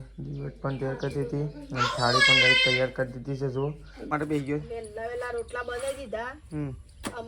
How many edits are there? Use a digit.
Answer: 1